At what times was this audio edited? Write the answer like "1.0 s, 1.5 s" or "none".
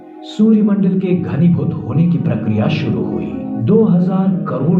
3.6 s